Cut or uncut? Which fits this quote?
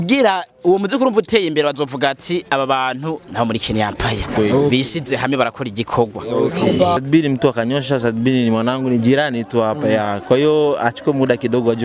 cut